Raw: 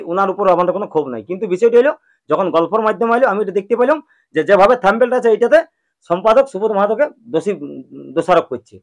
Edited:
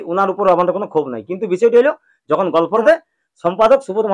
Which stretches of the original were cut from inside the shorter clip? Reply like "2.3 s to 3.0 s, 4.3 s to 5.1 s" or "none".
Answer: 2.8 s to 5.5 s